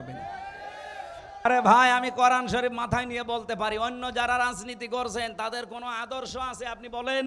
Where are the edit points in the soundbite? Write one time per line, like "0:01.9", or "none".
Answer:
0:01.4